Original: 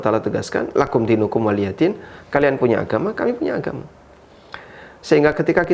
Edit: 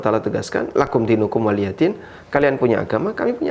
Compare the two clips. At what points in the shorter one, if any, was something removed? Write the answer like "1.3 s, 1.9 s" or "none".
none

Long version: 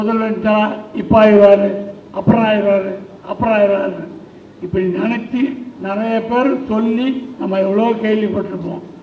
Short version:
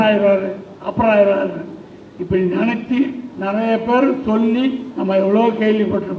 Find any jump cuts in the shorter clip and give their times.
none

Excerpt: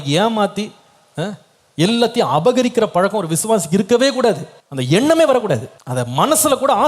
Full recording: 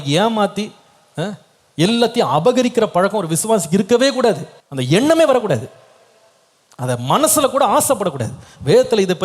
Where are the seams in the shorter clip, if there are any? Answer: 5.8 s

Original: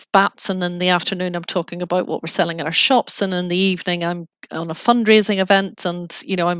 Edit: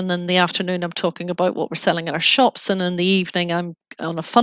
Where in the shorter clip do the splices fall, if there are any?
none

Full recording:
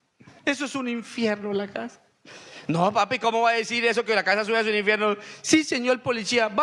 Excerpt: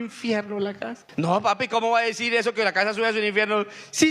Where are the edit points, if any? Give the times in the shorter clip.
0.9 s

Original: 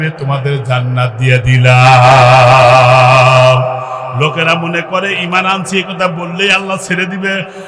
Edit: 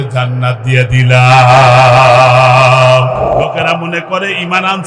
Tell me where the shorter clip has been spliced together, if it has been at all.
3.4 s

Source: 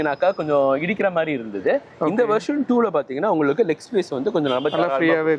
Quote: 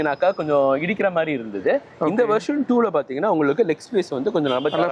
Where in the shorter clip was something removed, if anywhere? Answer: none

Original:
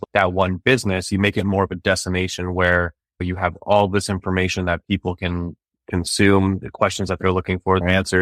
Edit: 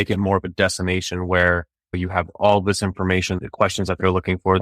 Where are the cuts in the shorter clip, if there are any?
3.4 s

